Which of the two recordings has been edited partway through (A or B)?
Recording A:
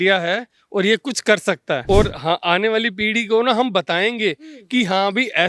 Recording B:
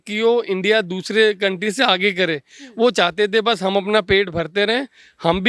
A